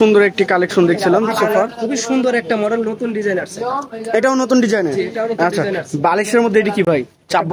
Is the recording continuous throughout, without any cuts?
yes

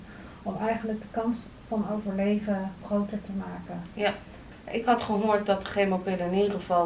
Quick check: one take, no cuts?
no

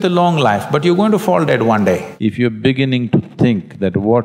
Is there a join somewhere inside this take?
yes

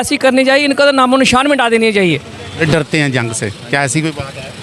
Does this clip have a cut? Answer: yes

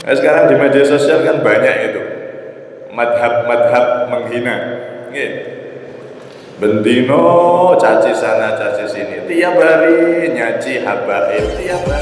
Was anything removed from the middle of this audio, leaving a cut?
no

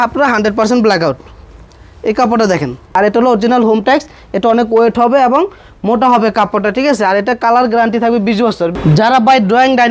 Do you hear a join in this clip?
yes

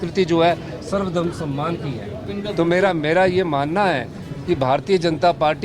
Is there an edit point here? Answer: yes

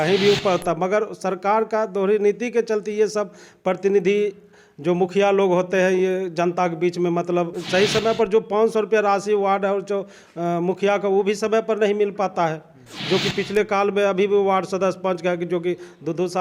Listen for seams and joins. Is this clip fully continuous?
no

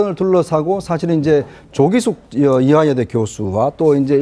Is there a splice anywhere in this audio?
no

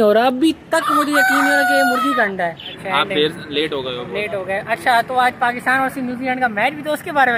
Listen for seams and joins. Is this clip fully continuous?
no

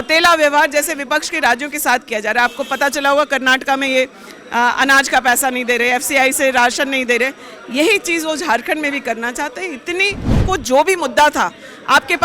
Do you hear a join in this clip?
yes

